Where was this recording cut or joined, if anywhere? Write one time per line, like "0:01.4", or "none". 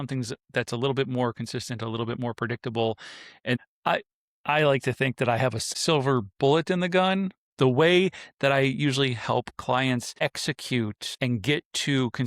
0:03.6
0:05.7
0:07.4
0:10.2
0:11.0